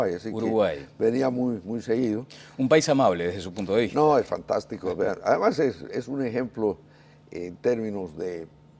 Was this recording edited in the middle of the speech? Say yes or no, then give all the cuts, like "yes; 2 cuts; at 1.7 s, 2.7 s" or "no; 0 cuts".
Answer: yes; 1 cut; at 1.0 s